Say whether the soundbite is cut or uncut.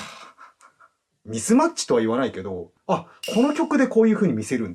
cut